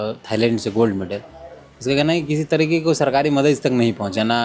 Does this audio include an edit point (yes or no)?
no